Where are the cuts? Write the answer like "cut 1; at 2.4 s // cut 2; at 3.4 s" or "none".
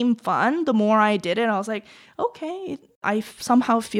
cut 1; at 3.0 s